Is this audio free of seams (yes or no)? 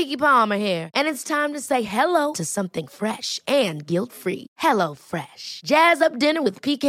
yes